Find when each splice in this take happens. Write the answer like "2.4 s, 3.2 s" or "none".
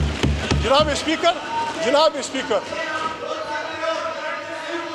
none